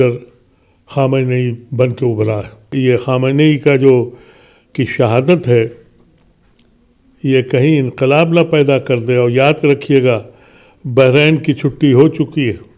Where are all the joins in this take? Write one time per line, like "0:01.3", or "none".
0:02.7